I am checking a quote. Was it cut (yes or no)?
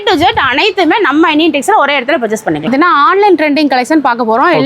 yes